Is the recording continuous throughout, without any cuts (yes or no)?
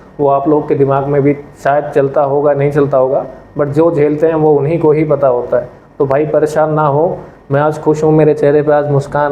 yes